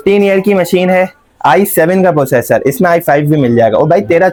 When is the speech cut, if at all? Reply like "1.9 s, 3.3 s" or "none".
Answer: none